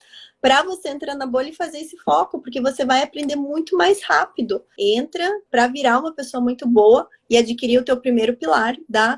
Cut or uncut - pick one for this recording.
cut